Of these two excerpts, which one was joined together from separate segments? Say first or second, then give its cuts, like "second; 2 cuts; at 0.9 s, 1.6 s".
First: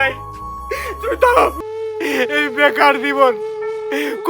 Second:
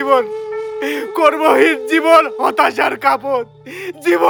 first; 1 cut; at 1.6 s